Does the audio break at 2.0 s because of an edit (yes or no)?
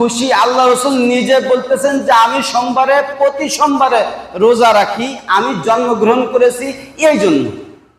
no